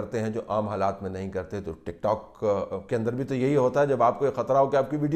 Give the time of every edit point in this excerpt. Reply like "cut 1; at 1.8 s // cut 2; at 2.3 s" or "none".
none